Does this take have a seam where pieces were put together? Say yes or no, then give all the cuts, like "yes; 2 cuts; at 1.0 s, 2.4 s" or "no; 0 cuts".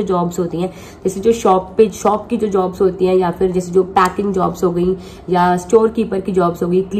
no; 0 cuts